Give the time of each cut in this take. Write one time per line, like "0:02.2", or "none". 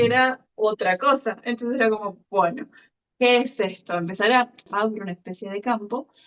0:04.6

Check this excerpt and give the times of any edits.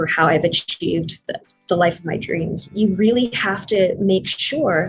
0:02.6

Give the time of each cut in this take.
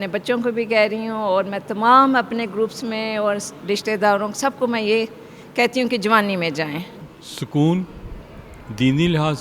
0:06.9

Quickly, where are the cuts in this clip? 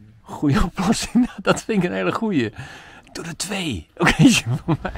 none

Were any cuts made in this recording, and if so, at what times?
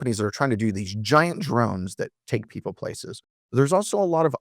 0:02.2

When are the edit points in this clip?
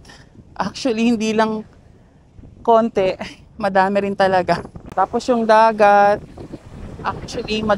0:04.8

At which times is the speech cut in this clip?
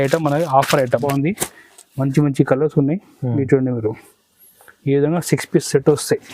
0:01.0

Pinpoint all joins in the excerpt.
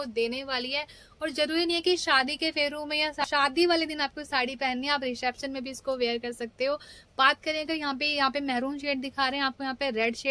0:03.2

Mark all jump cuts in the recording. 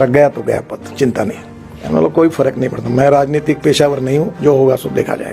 0:01.7

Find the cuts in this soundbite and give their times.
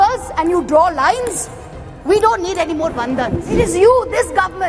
0:03.6

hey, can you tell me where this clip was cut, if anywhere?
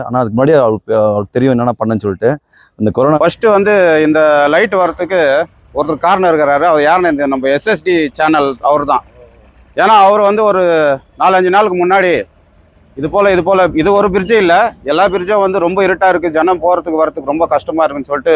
0:03.2

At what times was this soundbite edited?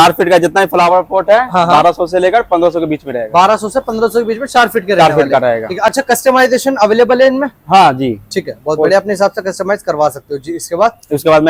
none

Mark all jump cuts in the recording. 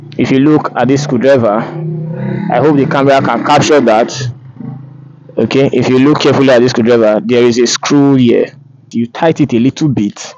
0:08.9

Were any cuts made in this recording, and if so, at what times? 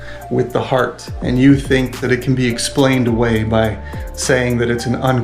0:02.0

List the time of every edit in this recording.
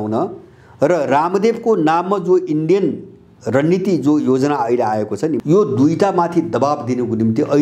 0:05.4

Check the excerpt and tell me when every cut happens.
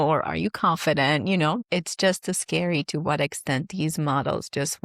0:01.6

